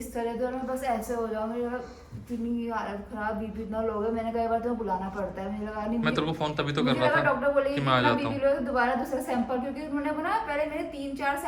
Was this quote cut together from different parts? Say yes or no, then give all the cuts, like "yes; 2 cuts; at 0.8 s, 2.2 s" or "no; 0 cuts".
no; 0 cuts